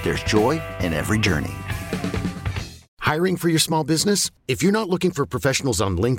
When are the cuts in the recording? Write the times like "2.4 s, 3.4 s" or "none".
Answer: 2.8 s